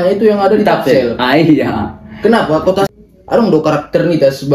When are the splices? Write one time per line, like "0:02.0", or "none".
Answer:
0:02.9